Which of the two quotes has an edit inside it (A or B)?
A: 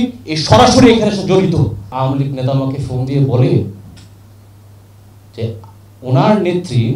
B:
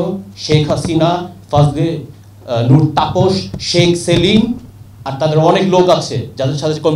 A